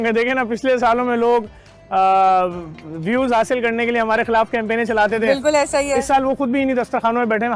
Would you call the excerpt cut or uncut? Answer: uncut